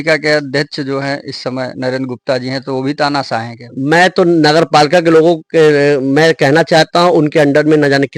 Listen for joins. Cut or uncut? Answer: uncut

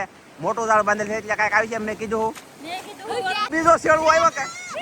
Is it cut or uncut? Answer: cut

